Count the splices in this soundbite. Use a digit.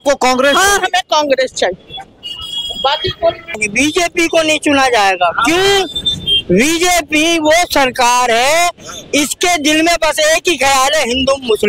1